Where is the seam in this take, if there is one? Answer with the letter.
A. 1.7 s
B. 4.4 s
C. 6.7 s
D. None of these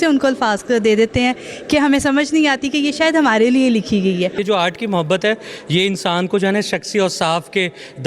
B